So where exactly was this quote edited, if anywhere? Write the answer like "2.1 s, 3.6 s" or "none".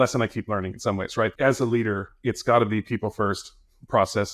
1.3 s